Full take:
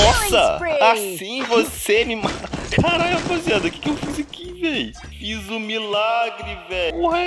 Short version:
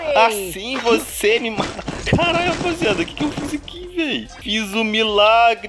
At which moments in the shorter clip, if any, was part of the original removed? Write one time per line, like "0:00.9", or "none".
0:04.4